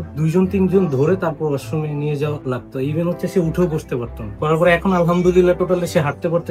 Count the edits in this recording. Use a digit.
1